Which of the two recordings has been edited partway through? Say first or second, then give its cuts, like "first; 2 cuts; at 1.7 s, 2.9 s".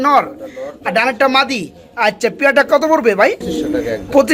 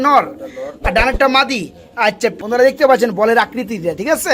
second; 1 cut; at 2.4 s